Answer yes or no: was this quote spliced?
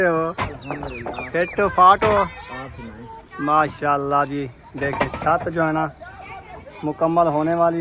no